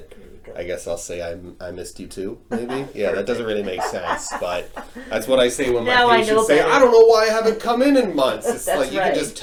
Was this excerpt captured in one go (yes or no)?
yes